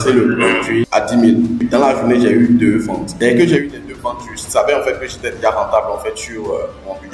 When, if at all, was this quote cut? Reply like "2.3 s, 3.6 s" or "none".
0.8 s, 1.6 s, 3.0 s